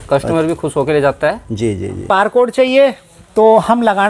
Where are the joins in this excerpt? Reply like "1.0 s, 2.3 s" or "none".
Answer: 2.0 s